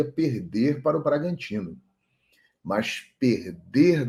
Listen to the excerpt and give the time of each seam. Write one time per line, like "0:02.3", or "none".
none